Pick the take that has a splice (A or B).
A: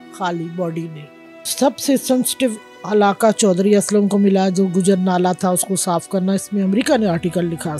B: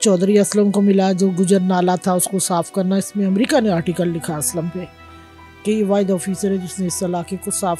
A